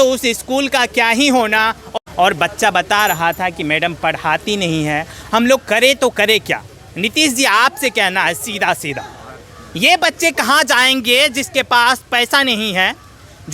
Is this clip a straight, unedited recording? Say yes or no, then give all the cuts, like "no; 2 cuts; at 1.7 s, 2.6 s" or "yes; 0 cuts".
no; 1 cut; at 1.8 s